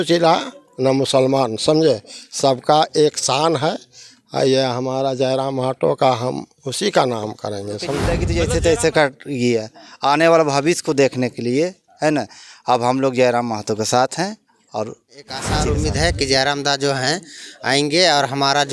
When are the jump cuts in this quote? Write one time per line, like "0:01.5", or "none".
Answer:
0:08.2
0:15.5